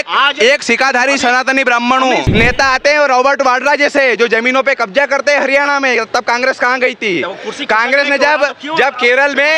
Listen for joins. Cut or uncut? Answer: cut